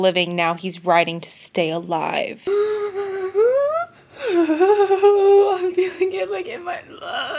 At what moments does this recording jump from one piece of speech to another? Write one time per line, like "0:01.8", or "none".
0:02.4